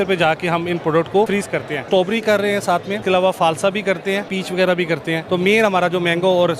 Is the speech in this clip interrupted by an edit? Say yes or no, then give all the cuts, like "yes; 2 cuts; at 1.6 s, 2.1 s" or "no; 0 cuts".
yes; 4 cuts; at 1.7 s, 2.9 s, 4.4 s, 5.2 s